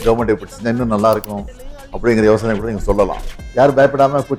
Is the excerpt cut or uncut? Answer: uncut